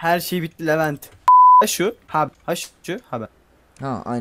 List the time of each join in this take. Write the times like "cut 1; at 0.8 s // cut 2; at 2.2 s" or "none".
cut 1; at 1.1 s // cut 2; at 1.6 s

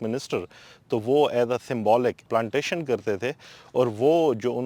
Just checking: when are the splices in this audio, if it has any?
none

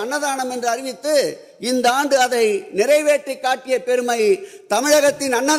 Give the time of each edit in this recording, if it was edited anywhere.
none

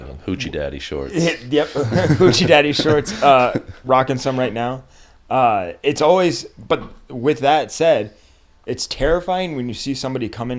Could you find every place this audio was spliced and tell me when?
none

